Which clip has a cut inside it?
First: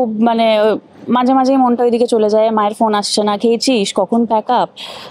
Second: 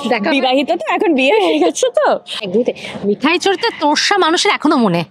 second; 1 cut; at 2.4 s

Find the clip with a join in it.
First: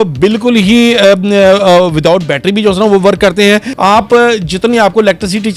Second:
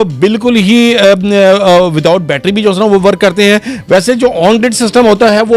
first; 1 cut; at 3.7 s

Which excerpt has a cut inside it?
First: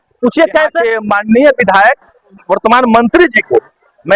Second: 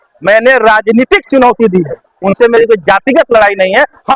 first; 2 cuts; at 0.9 s, 2.4 s

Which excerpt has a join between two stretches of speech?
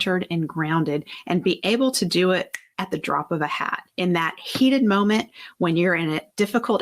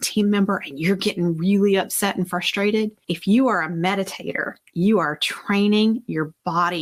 first; 3 cuts; at 1.1 s, 2.6 s, 3.8 s

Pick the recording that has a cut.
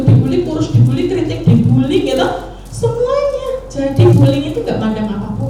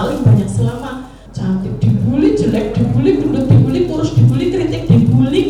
second; 1 cut; at 1.2 s

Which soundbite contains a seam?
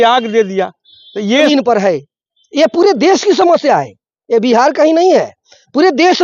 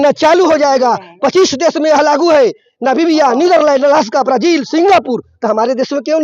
first; 1 cut; at 1.5 s

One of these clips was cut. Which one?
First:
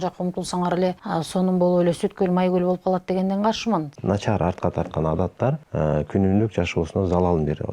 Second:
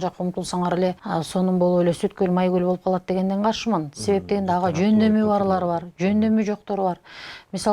first; 2 cuts; at 3.9 s, 5.6 s

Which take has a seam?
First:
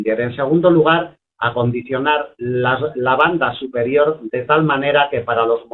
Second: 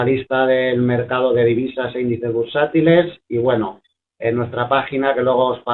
first; 1 cut; at 1.2 s

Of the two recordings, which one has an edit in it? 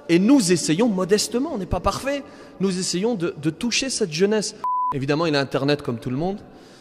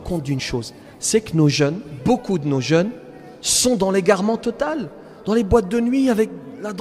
first; 1 cut; at 4.6 s

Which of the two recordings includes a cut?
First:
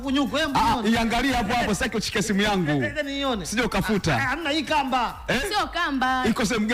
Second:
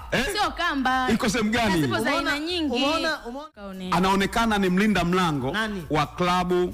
second; 1 cut; at 3.4 s

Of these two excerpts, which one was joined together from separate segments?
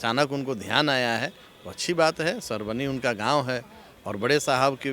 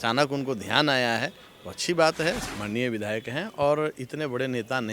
second; 1 cut; at 2.4 s

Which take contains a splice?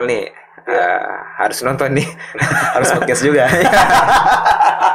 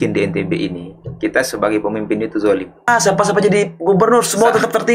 second; 1 cut; at 2.9 s

